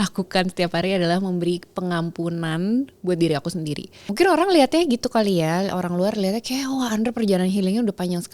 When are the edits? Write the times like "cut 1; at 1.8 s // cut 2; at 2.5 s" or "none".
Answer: cut 1; at 4.1 s